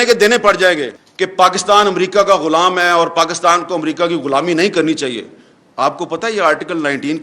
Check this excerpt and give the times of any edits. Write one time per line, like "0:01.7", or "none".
0:00.9